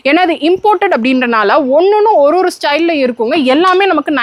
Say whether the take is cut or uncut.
uncut